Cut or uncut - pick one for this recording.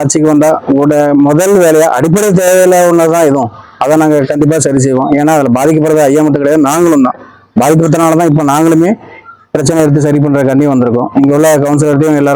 uncut